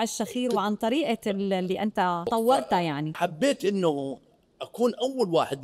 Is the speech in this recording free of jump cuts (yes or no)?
no